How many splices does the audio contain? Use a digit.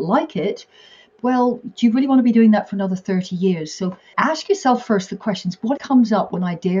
3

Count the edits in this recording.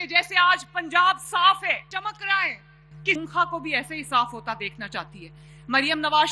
2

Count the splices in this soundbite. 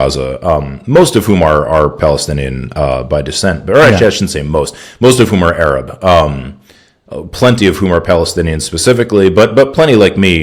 0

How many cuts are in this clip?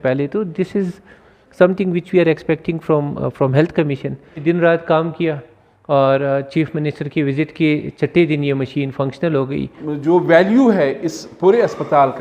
2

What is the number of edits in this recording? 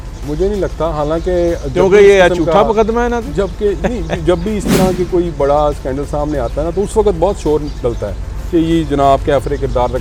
0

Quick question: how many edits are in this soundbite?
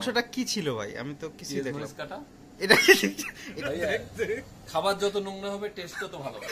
1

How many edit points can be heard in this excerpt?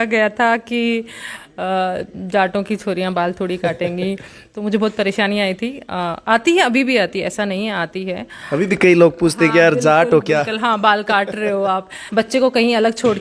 1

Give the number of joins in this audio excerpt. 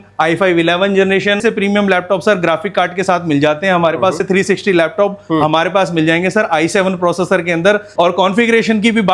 3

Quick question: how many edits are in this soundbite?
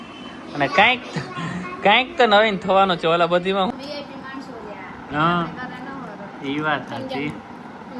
1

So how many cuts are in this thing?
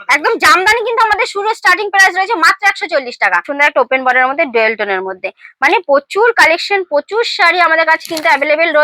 1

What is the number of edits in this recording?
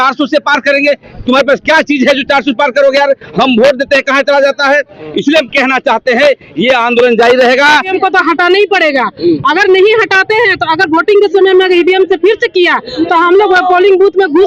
1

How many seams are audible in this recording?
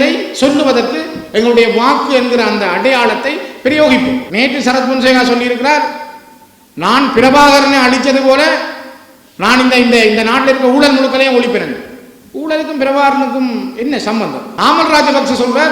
2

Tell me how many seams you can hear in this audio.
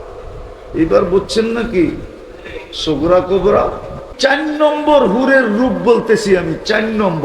1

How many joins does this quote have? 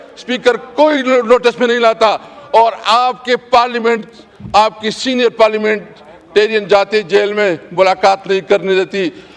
0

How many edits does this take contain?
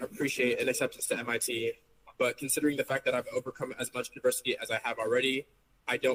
0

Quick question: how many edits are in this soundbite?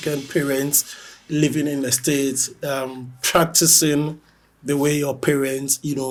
0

